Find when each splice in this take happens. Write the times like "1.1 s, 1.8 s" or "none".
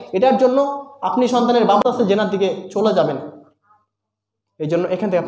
1.8 s